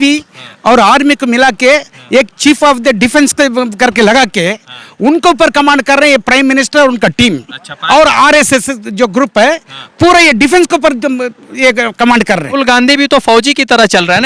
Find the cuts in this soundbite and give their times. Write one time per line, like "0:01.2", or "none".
0:12.6